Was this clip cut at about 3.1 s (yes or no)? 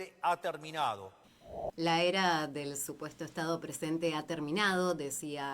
no